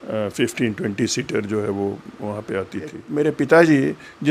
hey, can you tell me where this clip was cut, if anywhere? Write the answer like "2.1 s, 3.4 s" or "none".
3.0 s